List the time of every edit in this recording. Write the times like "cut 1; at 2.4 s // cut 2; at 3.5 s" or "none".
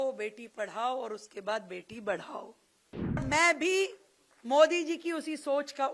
cut 1; at 3.2 s